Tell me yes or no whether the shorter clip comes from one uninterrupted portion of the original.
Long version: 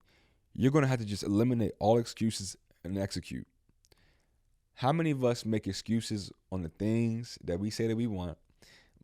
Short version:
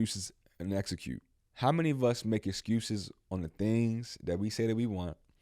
no